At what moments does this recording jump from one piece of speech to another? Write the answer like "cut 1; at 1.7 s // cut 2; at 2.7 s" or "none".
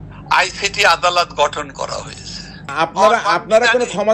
cut 1; at 2.6 s